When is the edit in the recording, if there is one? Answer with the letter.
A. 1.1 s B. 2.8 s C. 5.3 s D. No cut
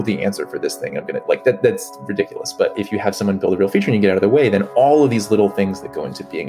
B